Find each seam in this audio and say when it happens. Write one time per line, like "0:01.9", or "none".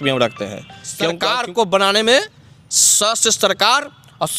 0:01.2